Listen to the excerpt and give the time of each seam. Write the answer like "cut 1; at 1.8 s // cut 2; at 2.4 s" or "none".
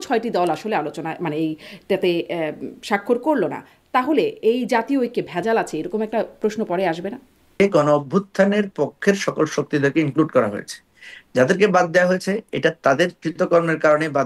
cut 1; at 7.6 s